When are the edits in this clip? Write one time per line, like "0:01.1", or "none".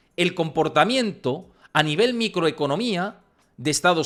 none

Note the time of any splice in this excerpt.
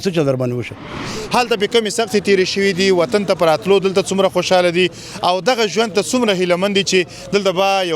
0:01.0

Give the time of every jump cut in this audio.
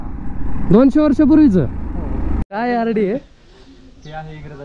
0:02.3

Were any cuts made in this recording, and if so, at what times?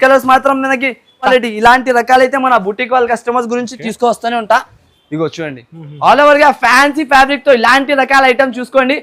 0:01.3

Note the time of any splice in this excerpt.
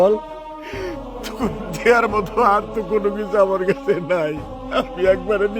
none

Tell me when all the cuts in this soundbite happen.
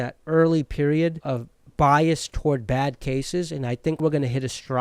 0:01.2
0:04.0

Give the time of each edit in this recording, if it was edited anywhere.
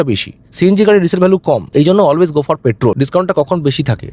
0:03.0

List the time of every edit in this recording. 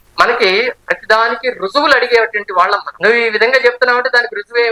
0:02.9

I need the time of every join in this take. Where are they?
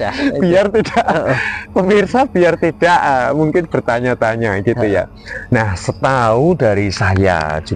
0:05.2

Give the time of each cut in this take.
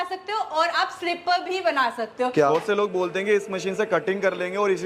0:02.5

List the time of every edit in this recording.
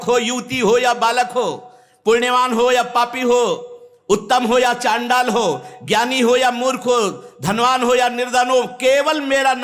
none

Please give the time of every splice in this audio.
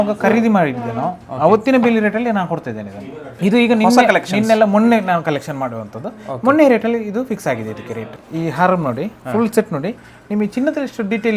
0:03.3
0:08.1

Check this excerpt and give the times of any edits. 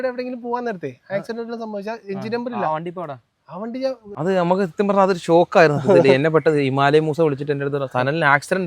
0:04.1

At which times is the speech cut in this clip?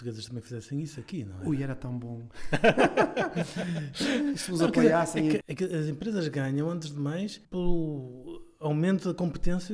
none

